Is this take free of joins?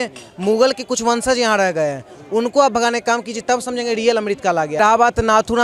yes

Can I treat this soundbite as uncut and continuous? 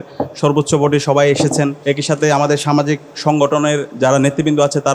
no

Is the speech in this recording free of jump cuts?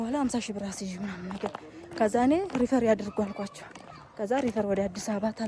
yes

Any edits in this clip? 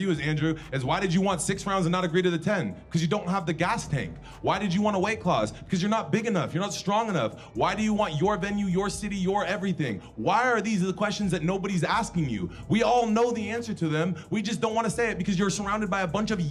no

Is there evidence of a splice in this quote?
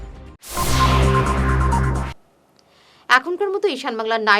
no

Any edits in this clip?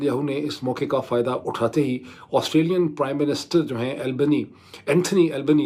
no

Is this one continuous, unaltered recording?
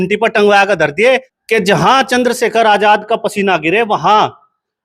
no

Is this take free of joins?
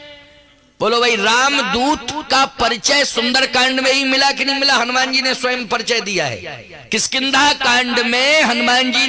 yes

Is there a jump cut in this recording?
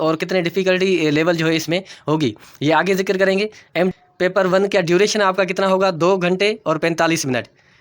yes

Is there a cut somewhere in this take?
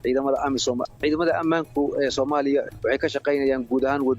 yes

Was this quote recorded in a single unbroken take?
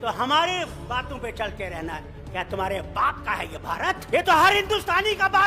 no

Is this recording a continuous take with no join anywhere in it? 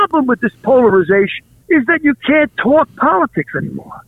yes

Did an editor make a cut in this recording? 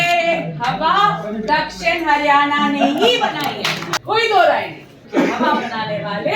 yes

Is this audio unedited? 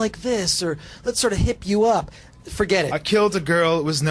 no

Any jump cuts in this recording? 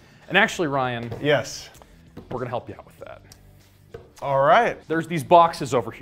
yes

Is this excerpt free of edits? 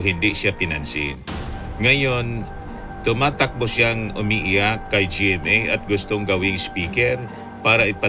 yes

